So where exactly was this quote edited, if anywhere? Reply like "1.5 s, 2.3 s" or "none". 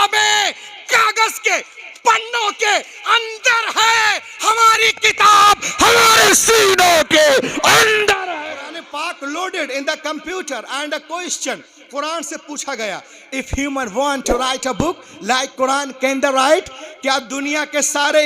8.8 s